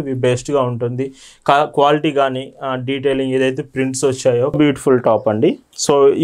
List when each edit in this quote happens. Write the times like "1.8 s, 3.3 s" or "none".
4.5 s